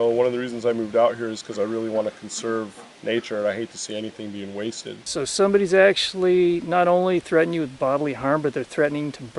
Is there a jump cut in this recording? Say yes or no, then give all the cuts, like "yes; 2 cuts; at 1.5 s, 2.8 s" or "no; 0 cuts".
yes; 1 cut; at 5.0 s